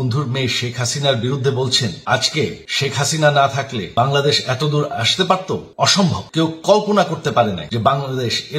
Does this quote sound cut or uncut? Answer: cut